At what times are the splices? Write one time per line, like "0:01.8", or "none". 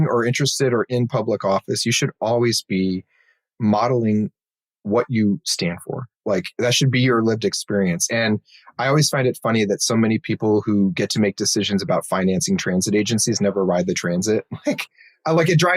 none